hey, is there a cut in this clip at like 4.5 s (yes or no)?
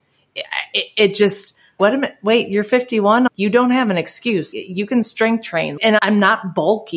yes